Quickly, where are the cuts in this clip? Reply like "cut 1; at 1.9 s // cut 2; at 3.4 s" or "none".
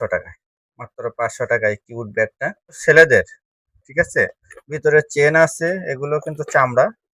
cut 1; at 2.8 s